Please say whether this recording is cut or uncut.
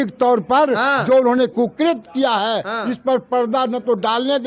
uncut